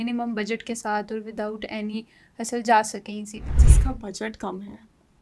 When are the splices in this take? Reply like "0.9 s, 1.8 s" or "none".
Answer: 3.7 s